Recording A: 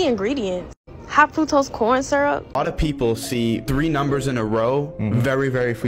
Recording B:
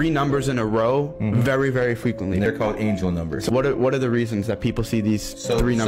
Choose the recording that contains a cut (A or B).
A